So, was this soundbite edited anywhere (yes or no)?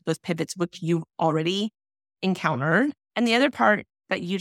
yes